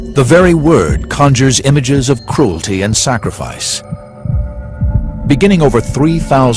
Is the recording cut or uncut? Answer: cut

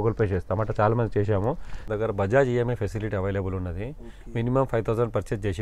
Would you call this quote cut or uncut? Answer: cut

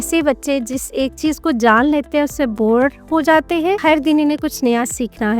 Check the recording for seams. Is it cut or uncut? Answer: cut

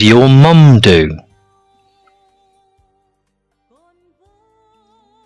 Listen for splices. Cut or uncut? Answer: cut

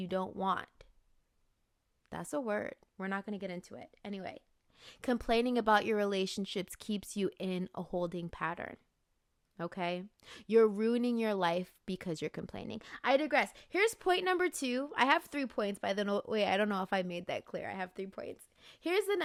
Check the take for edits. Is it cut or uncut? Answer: uncut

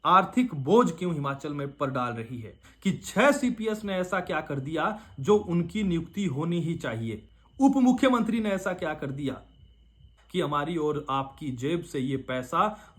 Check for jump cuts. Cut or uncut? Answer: cut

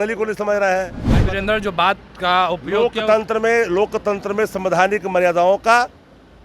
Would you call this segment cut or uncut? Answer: cut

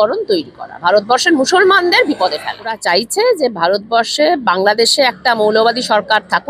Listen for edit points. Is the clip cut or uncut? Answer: cut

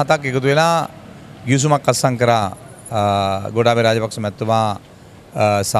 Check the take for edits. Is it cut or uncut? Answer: uncut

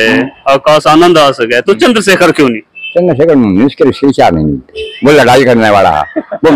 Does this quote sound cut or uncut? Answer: uncut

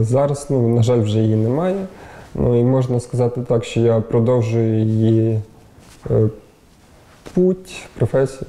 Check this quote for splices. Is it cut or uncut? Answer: uncut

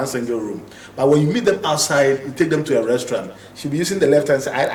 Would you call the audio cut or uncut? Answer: uncut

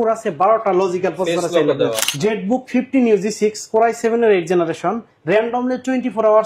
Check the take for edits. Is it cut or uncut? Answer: cut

